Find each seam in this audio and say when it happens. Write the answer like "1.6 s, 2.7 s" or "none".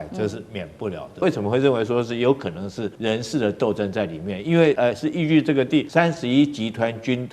1.2 s, 2.9 s, 4.8 s, 5.9 s

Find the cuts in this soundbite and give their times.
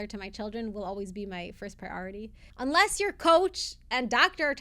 2.4 s

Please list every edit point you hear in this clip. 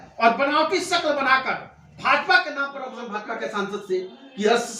3.1 s

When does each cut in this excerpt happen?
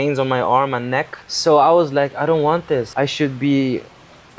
1.2 s, 2.9 s

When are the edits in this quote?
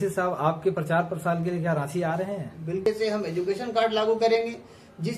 2.8 s

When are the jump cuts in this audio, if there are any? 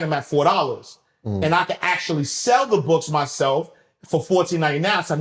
none

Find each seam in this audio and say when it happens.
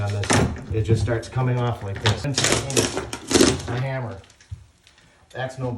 2.2 s

